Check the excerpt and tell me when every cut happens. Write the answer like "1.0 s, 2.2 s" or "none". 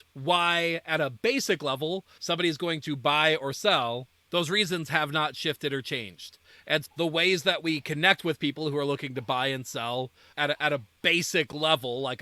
2.1 s, 4.1 s